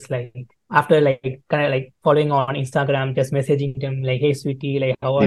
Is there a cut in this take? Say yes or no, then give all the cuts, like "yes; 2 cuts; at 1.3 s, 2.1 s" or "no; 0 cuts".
no; 0 cuts